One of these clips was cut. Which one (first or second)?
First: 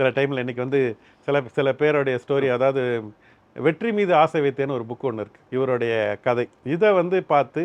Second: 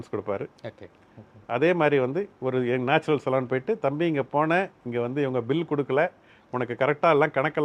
first